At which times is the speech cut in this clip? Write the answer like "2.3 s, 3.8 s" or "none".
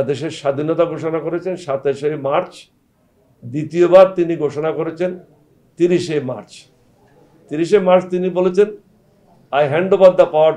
none